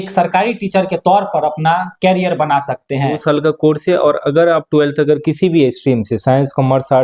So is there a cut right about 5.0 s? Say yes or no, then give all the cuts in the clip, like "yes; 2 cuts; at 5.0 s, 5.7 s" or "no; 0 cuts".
no; 1 cut; at 3.2 s